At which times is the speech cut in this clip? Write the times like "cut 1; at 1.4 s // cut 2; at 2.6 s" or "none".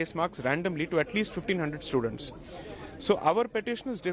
none